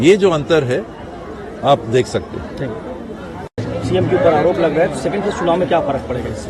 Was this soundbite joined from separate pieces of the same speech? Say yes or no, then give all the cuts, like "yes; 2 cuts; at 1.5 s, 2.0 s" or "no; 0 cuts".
yes; 1 cut; at 3.5 s